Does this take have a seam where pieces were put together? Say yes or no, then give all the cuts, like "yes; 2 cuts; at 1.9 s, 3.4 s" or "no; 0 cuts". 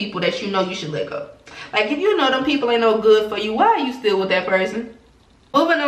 no; 0 cuts